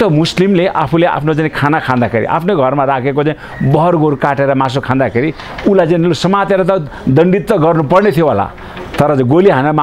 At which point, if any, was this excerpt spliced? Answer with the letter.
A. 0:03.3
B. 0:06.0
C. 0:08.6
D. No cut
D